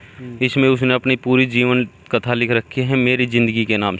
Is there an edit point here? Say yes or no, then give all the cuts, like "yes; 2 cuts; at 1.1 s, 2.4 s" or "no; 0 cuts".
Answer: no; 0 cuts